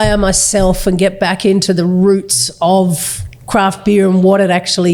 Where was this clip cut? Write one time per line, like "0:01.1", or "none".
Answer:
none